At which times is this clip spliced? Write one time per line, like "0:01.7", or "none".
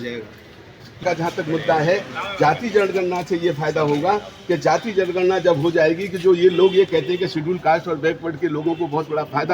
0:01.0